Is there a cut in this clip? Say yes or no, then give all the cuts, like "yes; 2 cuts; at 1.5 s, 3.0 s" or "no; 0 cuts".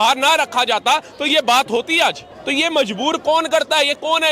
no; 0 cuts